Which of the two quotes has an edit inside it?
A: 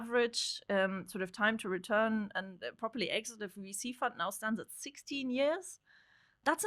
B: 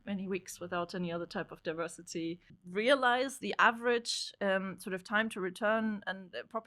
B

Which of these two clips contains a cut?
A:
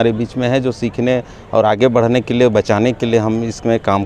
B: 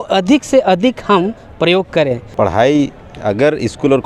B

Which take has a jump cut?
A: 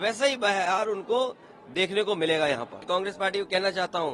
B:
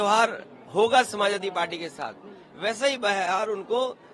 A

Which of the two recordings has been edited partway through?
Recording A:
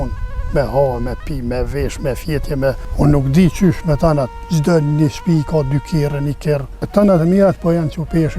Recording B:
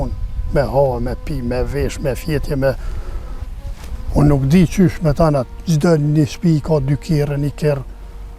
A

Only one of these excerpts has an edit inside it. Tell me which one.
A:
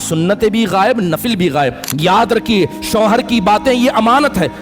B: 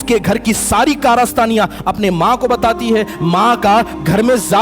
A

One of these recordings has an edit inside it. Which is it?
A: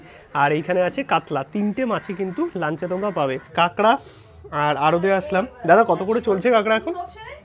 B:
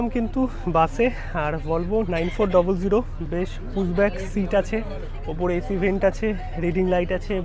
A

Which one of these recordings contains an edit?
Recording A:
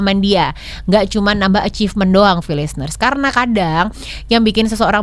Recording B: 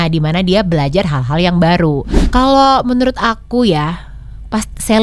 B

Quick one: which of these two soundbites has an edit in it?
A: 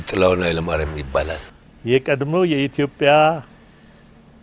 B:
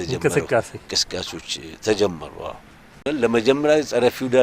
B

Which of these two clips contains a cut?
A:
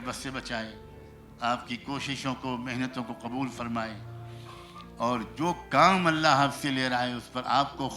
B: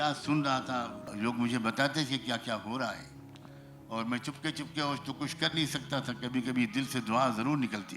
B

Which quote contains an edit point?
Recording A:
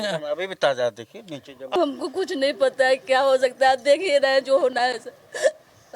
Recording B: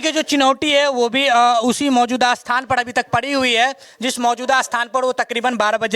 A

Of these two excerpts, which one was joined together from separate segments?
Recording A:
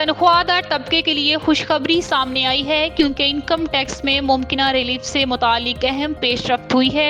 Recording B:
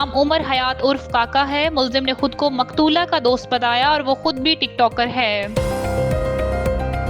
B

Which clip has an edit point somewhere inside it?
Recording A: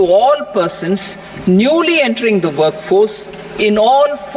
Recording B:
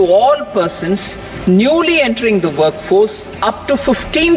B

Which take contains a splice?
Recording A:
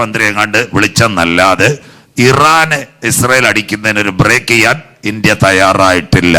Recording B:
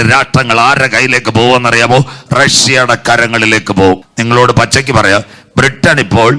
B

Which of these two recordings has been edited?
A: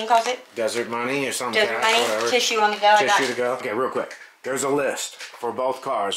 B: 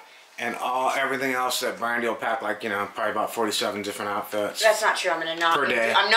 A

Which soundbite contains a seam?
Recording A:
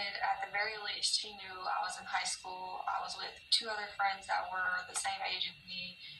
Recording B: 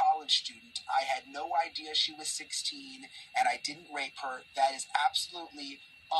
A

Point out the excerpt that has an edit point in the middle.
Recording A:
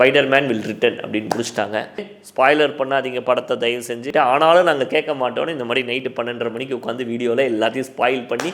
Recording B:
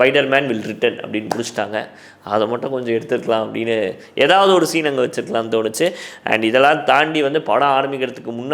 A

